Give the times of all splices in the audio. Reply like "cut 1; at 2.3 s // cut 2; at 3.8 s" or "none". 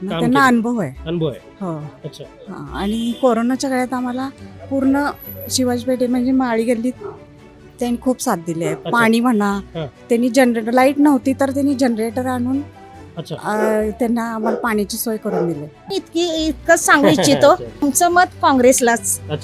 cut 1; at 15.9 s // cut 2; at 17.8 s